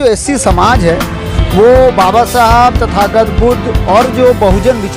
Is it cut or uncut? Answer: uncut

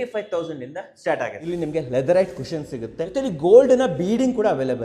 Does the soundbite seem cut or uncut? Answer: cut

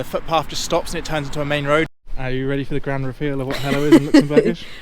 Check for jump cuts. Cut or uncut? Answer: cut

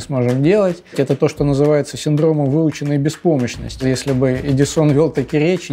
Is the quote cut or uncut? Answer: cut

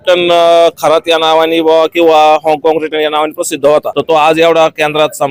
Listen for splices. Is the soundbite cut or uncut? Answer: cut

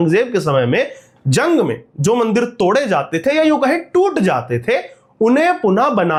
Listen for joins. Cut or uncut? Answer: uncut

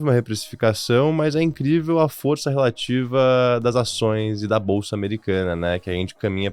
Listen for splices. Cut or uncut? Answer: uncut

